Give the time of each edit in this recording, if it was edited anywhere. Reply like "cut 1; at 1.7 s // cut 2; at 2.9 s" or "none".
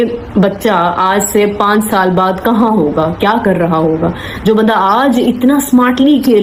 none